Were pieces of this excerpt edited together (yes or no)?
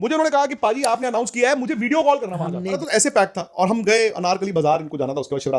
no